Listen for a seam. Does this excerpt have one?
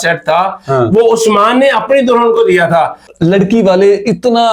no; 0 cuts

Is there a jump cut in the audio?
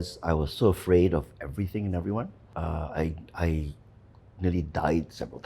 no; 0 cuts

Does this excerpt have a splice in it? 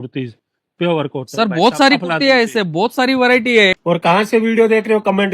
yes; 1 cut; at 3.8 s

